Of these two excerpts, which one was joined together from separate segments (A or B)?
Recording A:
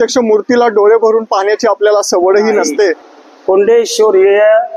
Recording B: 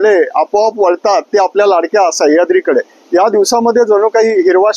A